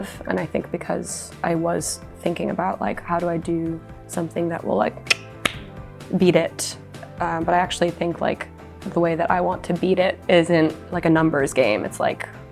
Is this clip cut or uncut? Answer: uncut